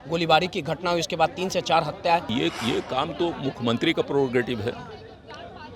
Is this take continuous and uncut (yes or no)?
no